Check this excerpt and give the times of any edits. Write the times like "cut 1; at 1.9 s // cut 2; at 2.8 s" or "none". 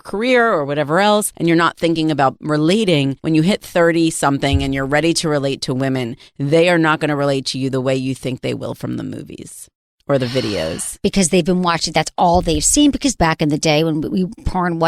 cut 1; at 1.3 s // cut 2; at 3.2 s // cut 3; at 13.2 s